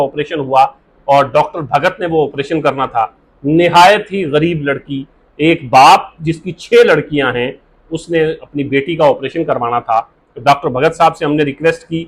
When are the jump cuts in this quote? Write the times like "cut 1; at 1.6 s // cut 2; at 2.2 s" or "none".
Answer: none